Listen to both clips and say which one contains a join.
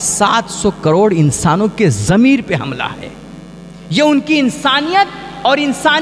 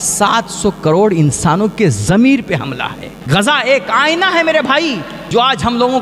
second; 2 cuts; at 3.1 s, 5.1 s

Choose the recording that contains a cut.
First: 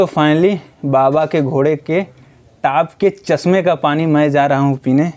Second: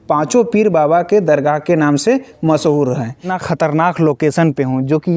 second; 1 cut; at 3.3 s

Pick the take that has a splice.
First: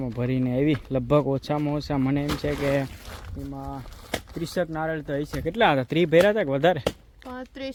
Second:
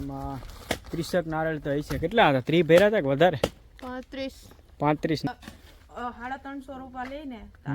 second; 1 cut; at 5.3 s

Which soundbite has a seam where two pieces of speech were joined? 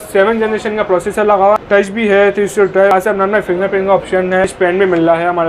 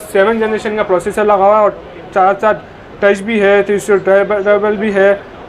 first; 3 cuts; at 1.6 s, 2.9 s, 4.5 s

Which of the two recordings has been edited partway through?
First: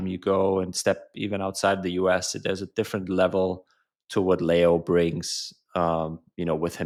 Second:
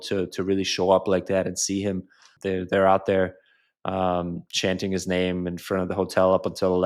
second; 1 cut; at 2.3 s

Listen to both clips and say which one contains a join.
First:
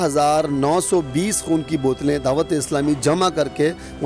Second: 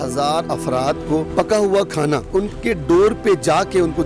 second; 2 cuts; at 1.3 s, 2.3 s

